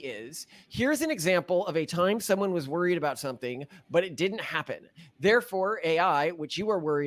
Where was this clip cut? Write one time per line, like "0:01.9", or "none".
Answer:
none